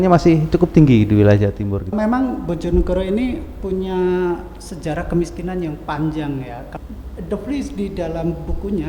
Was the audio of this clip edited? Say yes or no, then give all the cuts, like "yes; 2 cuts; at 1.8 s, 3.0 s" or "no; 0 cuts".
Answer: yes; 2 cuts; at 1.9 s, 6.7 s